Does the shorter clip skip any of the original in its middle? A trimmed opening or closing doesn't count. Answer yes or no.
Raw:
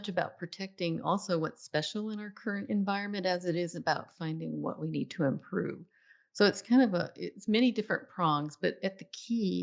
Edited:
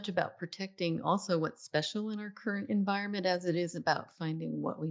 no